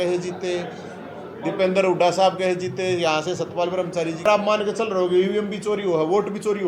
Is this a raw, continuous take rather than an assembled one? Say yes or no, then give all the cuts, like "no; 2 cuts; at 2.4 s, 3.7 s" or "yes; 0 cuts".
no; 1 cut; at 4.3 s